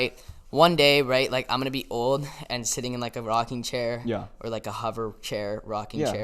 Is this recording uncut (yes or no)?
yes